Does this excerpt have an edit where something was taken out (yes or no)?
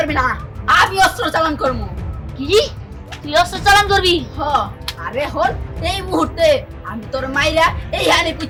no